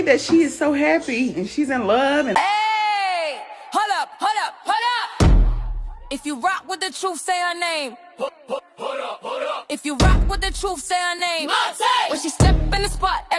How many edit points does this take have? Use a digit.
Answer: 1